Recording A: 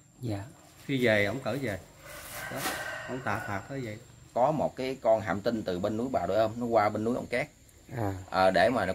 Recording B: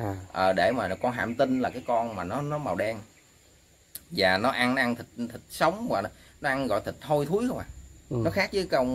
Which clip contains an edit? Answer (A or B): A